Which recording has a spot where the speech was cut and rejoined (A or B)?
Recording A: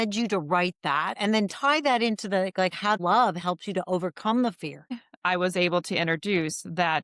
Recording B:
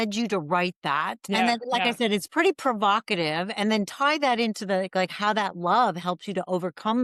A